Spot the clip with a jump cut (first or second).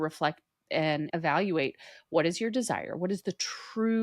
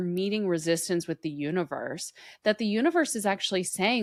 first